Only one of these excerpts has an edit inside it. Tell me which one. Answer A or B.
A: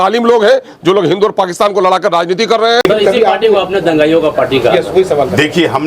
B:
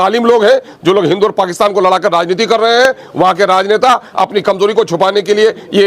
A